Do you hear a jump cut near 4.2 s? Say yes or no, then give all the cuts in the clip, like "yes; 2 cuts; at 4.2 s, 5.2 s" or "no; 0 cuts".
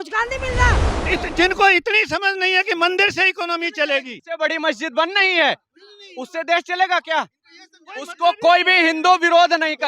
yes; 2 cuts; at 1.0 s, 4.2 s